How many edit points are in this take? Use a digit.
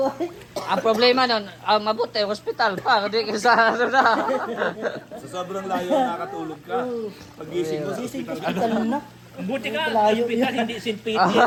0